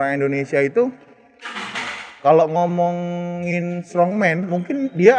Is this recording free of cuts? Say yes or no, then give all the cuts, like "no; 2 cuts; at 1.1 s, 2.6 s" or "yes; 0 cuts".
yes; 0 cuts